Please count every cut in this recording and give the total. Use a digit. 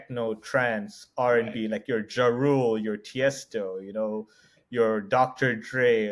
0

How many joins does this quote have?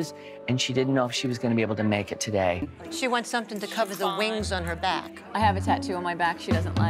1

